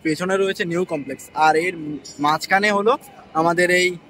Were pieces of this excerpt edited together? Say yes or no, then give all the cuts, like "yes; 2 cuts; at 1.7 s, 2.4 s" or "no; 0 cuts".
no; 0 cuts